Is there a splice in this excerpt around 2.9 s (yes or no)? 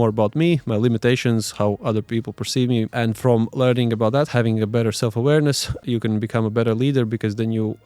yes